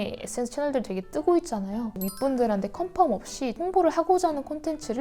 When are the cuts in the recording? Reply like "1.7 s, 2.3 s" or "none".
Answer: 1.9 s, 3.6 s